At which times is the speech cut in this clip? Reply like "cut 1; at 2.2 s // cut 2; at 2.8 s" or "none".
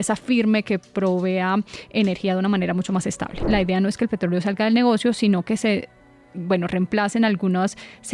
cut 1; at 3.4 s